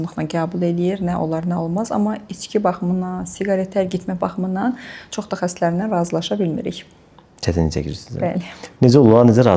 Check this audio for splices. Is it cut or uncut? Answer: uncut